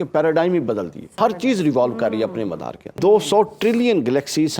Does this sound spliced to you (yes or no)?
yes